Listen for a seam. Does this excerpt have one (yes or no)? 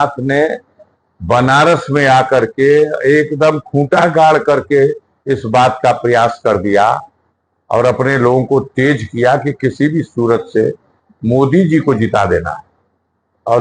no